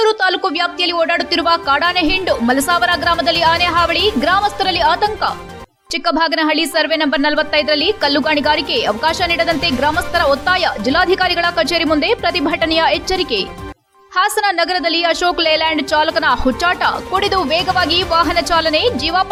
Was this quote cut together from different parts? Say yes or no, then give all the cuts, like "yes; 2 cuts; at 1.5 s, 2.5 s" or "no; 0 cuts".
no; 0 cuts